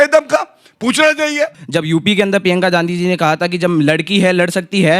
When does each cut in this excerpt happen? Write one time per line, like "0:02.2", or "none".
0:01.6